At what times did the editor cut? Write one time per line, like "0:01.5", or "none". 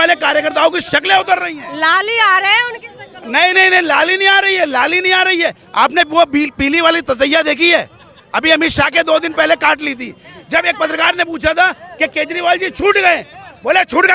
none